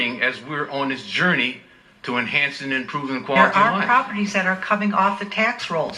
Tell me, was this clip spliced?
yes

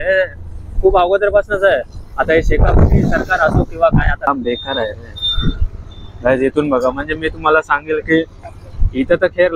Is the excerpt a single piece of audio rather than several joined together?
no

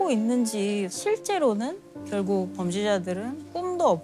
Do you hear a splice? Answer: yes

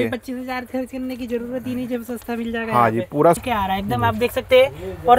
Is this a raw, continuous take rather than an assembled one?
no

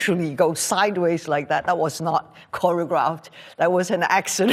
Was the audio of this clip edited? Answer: no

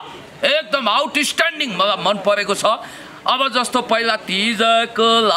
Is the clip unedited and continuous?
yes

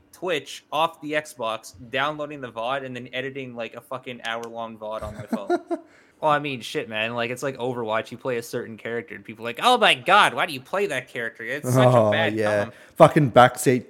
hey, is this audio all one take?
no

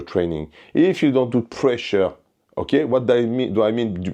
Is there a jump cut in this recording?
no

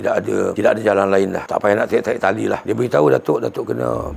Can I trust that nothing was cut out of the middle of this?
no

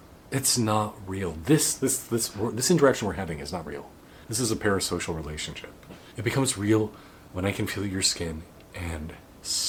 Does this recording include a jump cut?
no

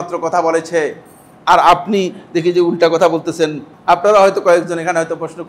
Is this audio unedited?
no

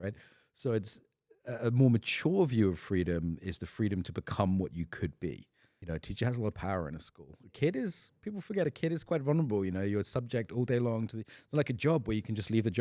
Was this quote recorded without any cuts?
no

